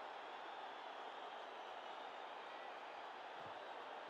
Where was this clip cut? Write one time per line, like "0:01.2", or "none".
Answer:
none